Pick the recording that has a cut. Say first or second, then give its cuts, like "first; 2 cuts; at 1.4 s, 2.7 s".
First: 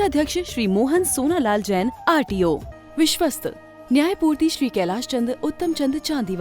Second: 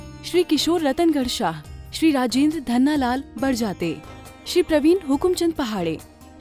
first; 1 cut; at 2.7 s